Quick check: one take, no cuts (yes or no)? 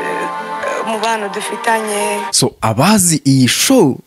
no